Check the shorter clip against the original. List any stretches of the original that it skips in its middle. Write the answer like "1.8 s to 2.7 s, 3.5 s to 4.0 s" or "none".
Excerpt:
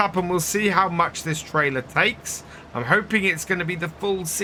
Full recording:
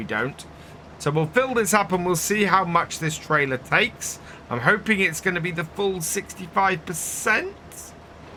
none